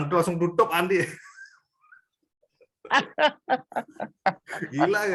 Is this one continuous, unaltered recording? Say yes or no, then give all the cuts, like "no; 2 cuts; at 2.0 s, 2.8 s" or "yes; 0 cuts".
yes; 0 cuts